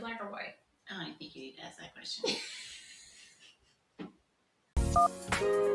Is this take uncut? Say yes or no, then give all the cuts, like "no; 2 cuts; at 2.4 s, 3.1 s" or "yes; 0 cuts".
yes; 0 cuts